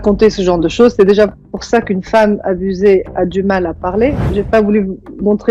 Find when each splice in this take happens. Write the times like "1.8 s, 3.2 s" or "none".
4.2 s